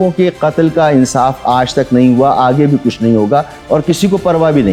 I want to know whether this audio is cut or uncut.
uncut